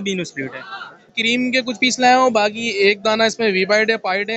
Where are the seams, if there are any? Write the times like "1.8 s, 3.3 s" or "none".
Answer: 1.2 s